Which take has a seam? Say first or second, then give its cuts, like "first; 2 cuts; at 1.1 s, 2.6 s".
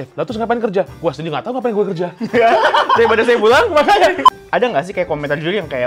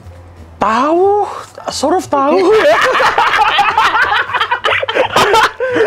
first; 1 cut; at 4.2 s